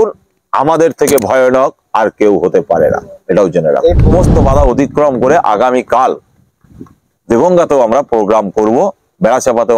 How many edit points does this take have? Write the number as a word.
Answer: one